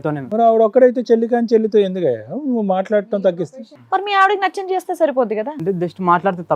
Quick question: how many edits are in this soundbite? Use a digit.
1